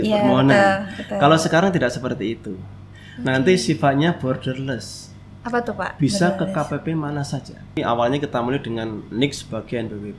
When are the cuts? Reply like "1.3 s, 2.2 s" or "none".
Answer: 7.8 s